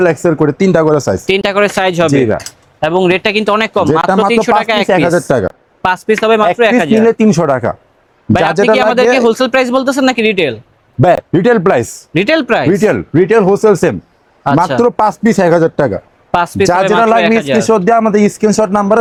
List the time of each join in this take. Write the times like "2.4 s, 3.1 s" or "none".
none